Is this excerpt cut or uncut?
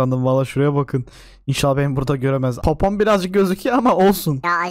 uncut